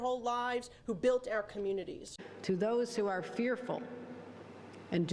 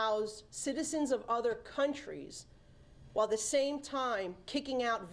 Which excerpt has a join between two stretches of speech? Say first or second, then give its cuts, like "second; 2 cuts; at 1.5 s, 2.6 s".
first; 1 cut; at 2.1 s